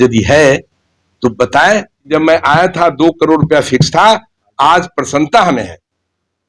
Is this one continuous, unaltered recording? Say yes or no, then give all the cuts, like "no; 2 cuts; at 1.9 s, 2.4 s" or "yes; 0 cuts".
no; 1 cut; at 2.1 s